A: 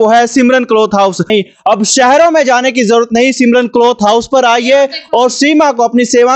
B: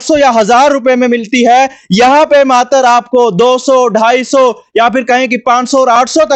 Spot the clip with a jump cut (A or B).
A